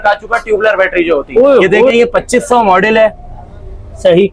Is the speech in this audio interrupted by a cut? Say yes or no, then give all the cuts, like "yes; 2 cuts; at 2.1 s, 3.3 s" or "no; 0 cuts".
yes; 1 cut; at 1.9 s